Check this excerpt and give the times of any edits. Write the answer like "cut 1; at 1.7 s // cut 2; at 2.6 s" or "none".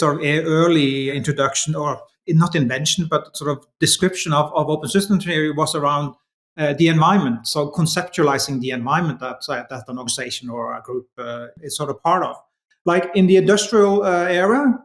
cut 1; at 1.1 s // cut 2; at 2.1 s // cut 3; at 11.5 s